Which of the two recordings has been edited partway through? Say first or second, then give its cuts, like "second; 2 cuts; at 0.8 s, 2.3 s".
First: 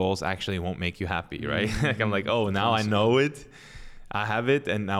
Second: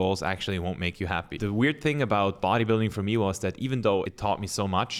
second; 2 cuts; at 1.3 s, 4.1 s